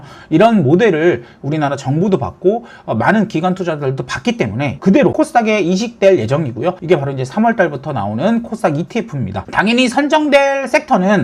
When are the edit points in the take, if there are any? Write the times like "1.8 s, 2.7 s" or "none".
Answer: 4.8 s, 6.8 s, 9.4 s